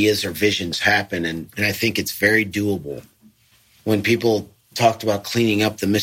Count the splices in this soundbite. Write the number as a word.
three